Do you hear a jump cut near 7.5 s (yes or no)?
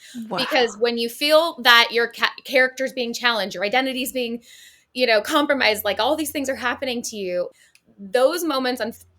yes